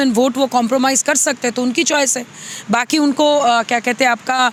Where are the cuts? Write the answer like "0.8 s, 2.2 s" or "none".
none